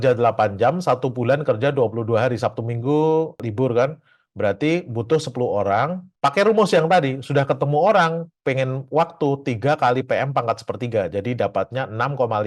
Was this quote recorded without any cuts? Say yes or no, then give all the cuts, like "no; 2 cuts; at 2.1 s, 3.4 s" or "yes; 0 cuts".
yes; 0 cuts